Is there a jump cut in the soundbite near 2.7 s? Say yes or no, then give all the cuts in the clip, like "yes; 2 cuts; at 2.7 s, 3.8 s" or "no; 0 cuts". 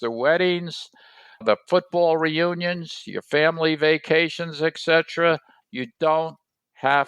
no; 2 cuts; at 1.4 s, 5.5 s